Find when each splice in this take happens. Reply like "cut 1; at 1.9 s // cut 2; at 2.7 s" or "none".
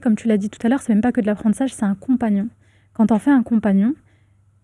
none